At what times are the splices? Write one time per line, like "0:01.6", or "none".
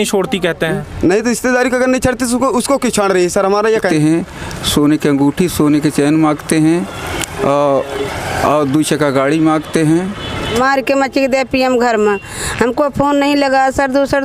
0:03.9
0:10.5

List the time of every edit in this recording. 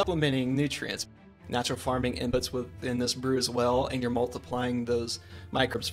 0:01.2

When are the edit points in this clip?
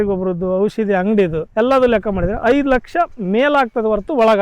0:01.4

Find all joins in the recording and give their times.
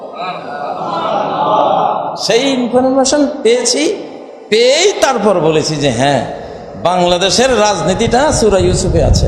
none

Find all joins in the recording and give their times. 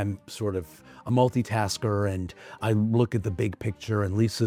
none

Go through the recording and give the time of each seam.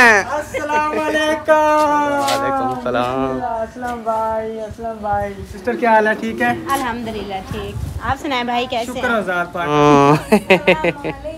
0:03.5
0:05.6
0:09.7

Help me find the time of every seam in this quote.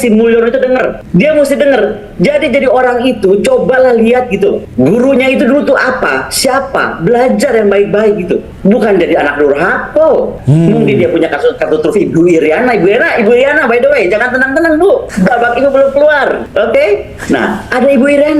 0:01.0
0:04.6
0:08.5
0:10.4
0:11.6
0:15.1
0:16.4

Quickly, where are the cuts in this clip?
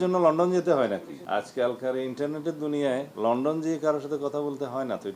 0:01.1
0:03.1

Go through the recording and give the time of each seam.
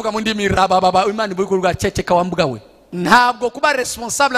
0:02.9

